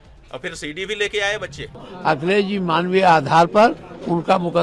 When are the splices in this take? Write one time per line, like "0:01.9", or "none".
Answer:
0:01.9